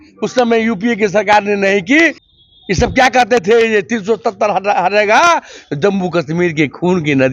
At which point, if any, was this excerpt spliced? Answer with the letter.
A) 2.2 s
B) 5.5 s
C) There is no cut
A